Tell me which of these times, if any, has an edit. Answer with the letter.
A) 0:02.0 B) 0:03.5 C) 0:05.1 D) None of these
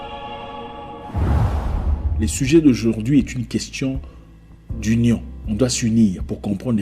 A